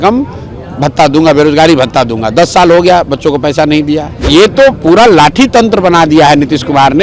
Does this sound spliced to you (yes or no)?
yes